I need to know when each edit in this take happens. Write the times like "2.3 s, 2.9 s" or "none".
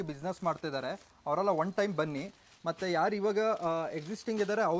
none